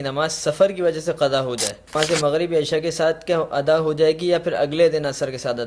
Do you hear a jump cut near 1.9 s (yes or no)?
yes